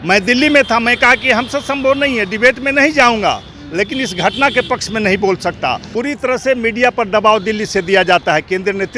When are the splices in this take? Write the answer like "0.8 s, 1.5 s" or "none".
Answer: 5.9 s